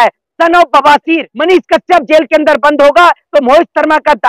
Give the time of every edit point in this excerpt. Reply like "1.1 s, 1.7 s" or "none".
1.3 s

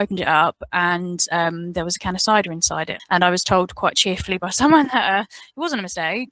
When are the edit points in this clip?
2.9 s

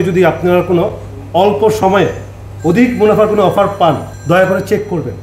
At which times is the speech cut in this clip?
4.1 s

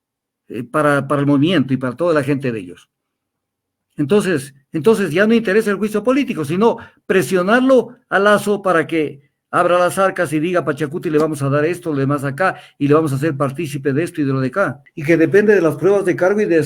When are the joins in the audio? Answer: 14.9 s

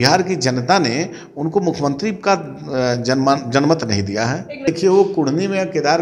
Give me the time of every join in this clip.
4.7 s

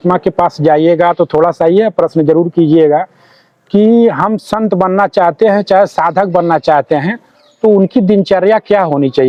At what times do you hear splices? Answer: none

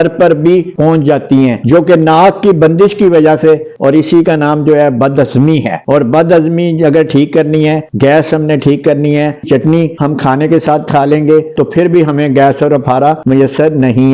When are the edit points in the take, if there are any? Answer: 3.7 s, 9.4 s

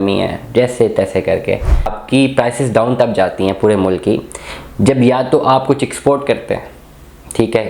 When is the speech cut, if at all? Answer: 2.0 s

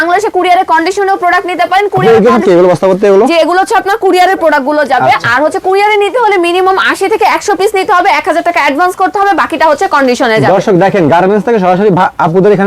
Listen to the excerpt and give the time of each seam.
none

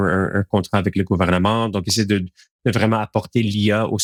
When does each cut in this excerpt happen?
none

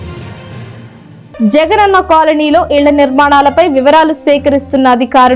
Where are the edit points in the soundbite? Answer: 1.1 s

